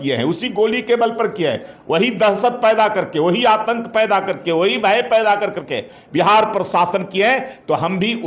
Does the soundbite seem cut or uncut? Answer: uncut